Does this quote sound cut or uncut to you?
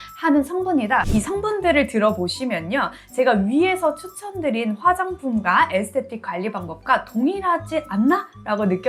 cut